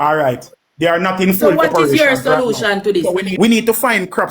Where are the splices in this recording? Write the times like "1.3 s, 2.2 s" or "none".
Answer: 3.3 s